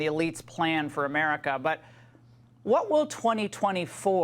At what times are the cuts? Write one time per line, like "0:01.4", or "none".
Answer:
0:01.9